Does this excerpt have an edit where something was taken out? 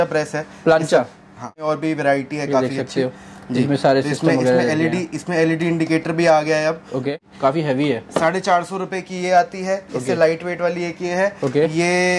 yes; 2 cuts; at 1.6 s, 7.2 s

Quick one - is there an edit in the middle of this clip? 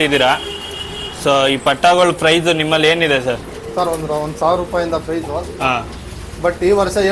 no; 0 cuts

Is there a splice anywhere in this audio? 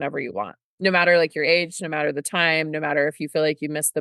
no; 0 cuts

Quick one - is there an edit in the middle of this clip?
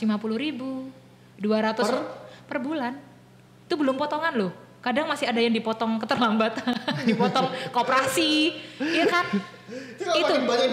no; 0 cuts

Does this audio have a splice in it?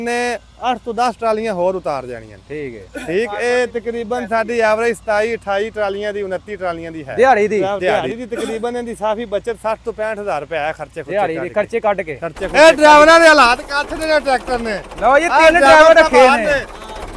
yes; 2 cuts; at 7.8 s, 12.4 s

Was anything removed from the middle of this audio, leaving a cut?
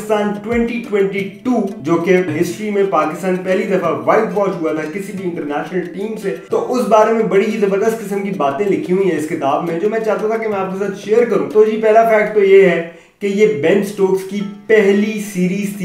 no; 0 cuts

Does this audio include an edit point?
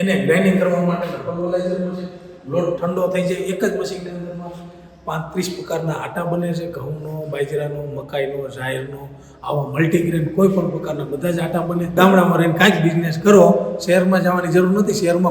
yes; 1 cut; at 12.0 s

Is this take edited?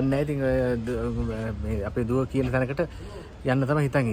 no; 0 cuts

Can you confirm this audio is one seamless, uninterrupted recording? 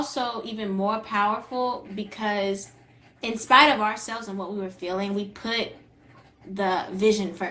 yes; 0 cuts

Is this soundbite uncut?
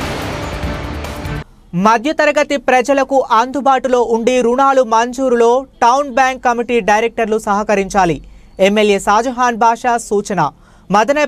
no; 1 cut; at 1.0 s

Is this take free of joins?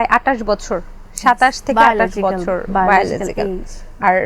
yes; 0 cuts

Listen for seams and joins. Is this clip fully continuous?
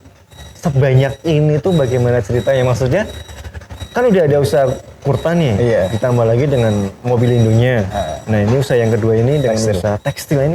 yes; 0 cuts

